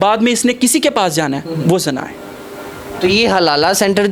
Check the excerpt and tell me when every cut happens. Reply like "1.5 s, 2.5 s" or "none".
none